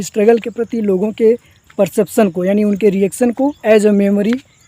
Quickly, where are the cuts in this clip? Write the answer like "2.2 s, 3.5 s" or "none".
3.6 s